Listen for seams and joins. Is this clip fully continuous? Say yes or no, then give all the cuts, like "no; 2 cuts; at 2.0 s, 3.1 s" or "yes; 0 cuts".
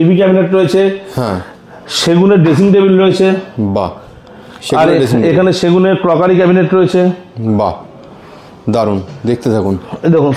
yes; 0 cuts